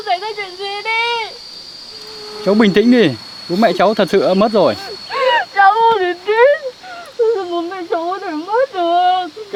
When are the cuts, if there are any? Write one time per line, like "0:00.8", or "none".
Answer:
none